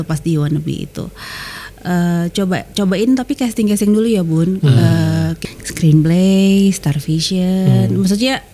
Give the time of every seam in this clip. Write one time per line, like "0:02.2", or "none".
0:05.4